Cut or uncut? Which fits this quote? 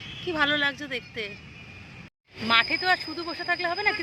cut